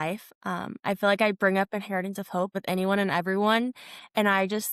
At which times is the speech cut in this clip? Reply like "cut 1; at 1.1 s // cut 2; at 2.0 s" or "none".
cut 1; at 2.5 s